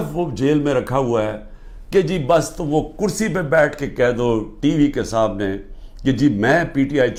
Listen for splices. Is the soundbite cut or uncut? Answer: uncut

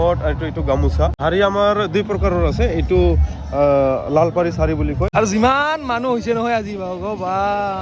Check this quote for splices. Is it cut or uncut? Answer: cut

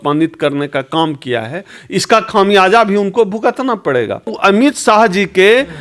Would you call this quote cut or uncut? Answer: cut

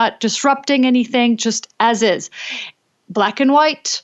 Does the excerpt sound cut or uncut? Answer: uncut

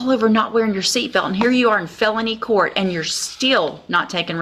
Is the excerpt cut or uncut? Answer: uncut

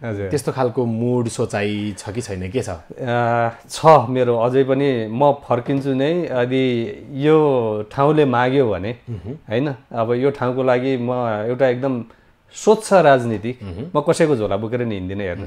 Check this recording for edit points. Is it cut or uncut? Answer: uncut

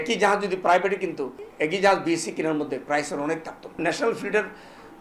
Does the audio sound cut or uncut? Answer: cut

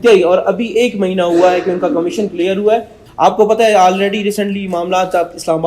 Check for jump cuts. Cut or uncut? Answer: cut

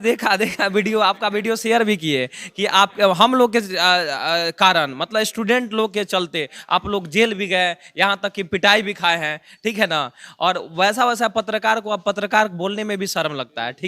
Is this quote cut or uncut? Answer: uncut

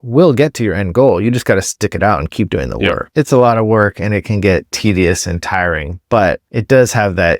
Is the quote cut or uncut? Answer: cut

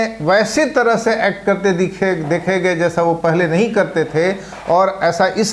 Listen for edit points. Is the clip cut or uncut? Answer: uncut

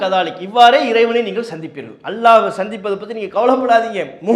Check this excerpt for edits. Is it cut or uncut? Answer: uncut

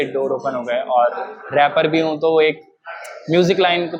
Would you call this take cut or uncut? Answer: uncut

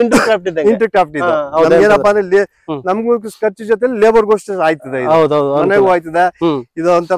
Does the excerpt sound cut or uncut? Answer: uncut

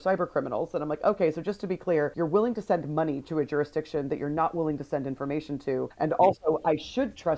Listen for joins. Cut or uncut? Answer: cut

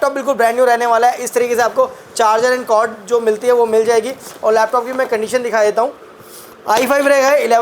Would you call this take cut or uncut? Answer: uncut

